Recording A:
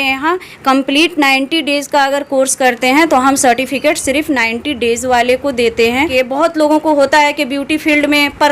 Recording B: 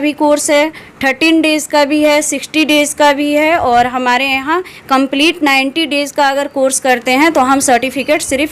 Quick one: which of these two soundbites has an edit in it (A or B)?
A